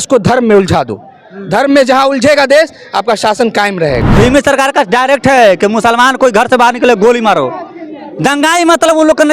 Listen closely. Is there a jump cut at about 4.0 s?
yes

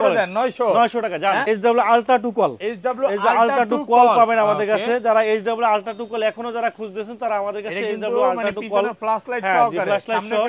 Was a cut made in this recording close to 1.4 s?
yes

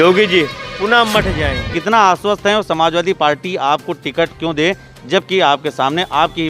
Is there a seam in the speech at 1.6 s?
yes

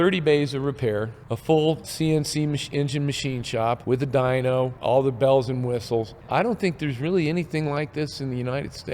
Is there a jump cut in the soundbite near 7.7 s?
no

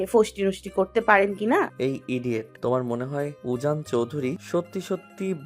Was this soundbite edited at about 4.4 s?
yes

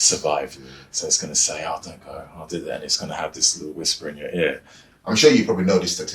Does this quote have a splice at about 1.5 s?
no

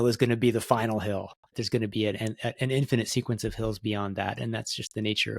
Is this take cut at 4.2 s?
no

